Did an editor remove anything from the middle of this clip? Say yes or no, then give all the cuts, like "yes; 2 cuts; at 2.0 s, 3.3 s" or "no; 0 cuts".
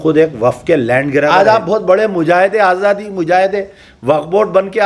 yes; 1 cut; at 1.3 s